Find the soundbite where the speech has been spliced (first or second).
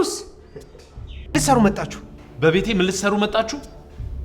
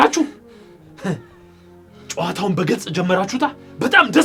first